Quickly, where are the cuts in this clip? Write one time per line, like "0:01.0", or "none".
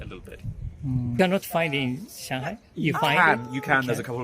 0:01.2